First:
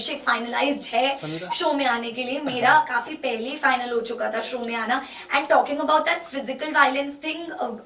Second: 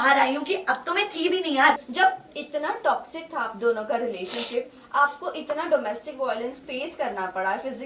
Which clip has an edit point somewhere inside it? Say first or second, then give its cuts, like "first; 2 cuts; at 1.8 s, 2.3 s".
second; 1 cut; at 1.9 s